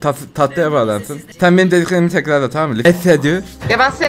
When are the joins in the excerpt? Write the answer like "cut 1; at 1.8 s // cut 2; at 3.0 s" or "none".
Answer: cut 1; at 2.8 s

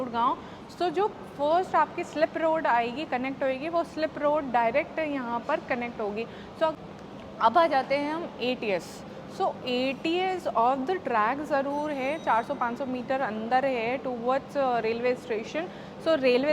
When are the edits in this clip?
cut 1; at 6.8 s

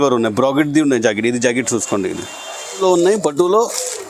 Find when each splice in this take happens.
cut 1; at 2.8 s

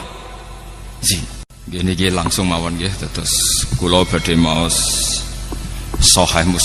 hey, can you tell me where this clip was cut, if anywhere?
cut 1; at 1.5 s

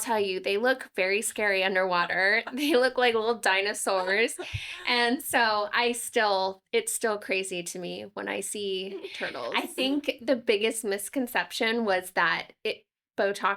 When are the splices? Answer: cut 1; at 9.4 s

